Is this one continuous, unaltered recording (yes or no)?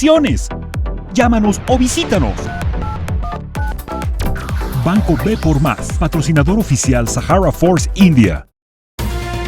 no